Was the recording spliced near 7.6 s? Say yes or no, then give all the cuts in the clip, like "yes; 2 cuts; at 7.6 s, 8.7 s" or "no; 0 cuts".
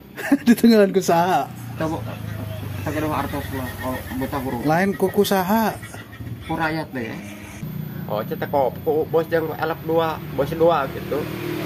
yes; 1 cut; at 7.6 s